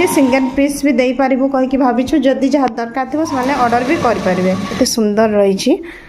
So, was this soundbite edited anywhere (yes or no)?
yes